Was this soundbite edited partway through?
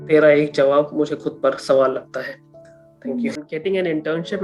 yes; 1 cut; at 3.4 s

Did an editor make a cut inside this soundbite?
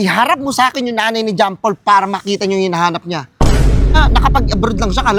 no; 0 cuts

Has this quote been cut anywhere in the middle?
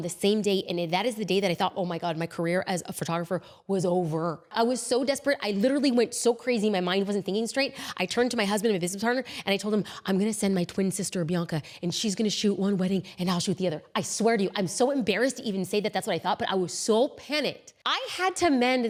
no; 0 cuts

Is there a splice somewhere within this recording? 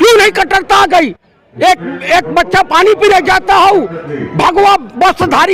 no; 0 cuts

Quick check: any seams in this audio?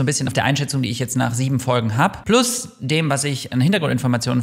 no; 0 cuts

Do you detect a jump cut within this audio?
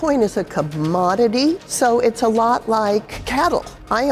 yes; 2 cuts; at 1.7 s, 3.2 s

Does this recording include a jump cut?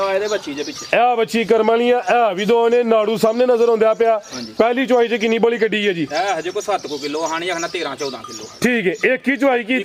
no; 0 cuts

